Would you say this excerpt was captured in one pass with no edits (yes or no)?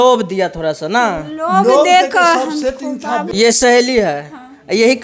no